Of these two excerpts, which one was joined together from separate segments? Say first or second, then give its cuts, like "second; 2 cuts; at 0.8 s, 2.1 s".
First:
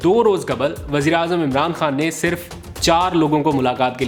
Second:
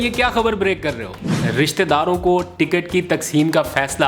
second; 1 cut; at 1.4 s